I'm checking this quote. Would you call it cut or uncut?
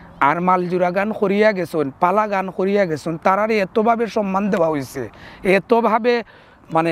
uncut